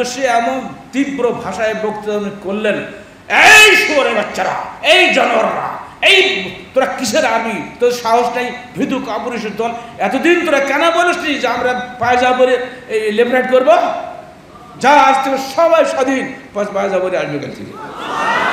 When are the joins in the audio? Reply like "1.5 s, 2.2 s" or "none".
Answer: none